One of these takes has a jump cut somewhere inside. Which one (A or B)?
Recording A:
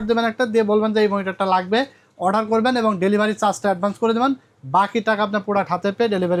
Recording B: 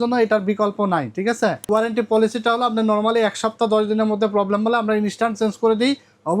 B